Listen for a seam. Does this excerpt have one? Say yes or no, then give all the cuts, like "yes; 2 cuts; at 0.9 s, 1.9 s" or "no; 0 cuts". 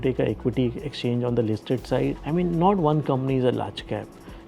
yes; 1 cut; at 2.2 s